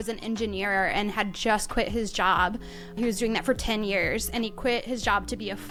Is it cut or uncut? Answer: uncut